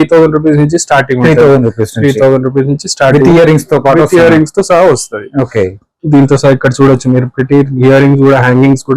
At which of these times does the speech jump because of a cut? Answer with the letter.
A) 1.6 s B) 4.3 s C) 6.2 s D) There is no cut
D